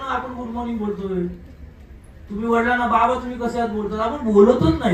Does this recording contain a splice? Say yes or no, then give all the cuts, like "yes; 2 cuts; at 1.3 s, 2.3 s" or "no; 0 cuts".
no; 0 cuts